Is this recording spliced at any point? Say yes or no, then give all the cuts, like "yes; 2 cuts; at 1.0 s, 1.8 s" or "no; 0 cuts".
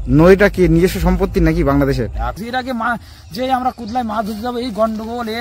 yes; 1 cut; at 2.4 s